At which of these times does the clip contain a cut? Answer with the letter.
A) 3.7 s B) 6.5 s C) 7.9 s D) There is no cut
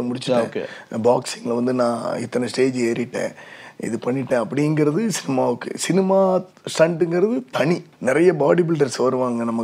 C